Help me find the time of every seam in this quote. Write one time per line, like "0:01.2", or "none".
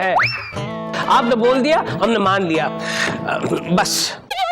none